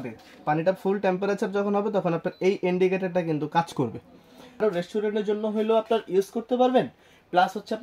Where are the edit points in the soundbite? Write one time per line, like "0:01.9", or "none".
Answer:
0:04.6